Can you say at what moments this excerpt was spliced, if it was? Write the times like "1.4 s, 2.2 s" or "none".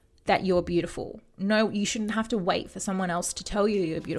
none